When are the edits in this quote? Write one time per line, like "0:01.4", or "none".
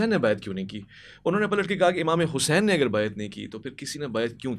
none